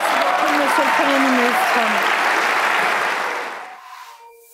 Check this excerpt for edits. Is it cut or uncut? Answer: cut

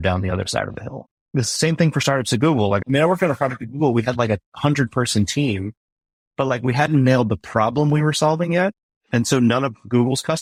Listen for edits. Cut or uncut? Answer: uncut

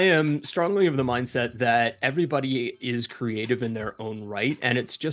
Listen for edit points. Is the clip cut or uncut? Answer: uncut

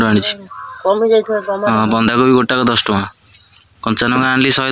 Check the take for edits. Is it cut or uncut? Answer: uncut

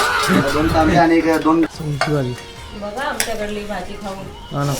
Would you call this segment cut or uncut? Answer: cut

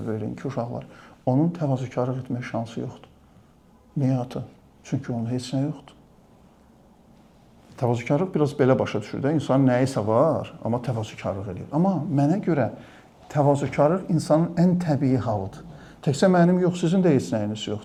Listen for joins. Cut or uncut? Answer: uncut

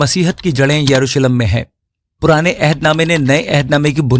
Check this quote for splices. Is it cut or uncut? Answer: uncut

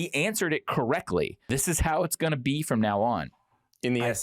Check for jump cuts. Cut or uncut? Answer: cut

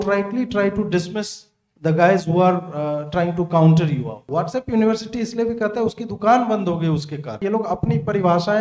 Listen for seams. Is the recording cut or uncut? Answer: cut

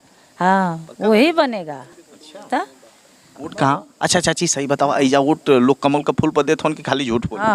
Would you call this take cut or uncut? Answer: uncut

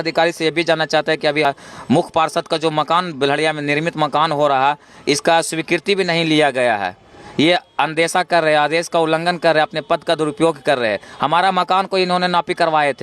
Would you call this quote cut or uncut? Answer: cut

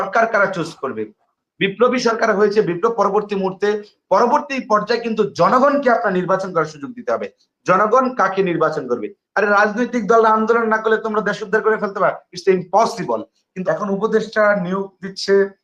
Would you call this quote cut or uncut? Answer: cut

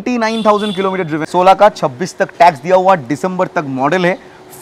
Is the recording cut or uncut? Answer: cut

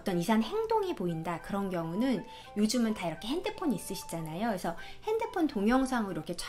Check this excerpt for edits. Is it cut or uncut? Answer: uncut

